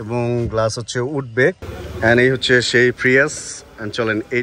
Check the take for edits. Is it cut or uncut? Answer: cut